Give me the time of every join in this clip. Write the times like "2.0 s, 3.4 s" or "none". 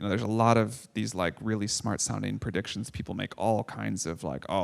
none